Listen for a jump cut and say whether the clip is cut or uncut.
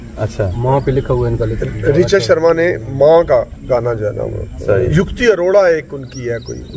cut